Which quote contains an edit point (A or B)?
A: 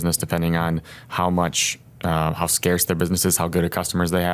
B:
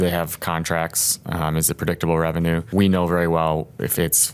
B